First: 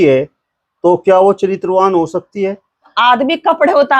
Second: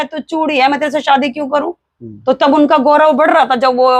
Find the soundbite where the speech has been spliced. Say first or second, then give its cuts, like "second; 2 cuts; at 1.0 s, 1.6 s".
first; 1 cut; at 2.9 s